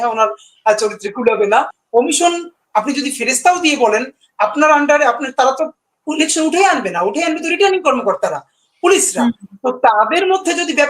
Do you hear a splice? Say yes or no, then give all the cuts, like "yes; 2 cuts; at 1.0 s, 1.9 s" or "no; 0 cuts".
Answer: yes; 1 cut; at 1.8 s